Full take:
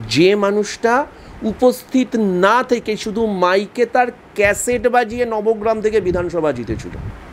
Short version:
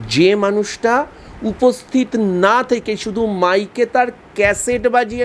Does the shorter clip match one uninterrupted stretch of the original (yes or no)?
yes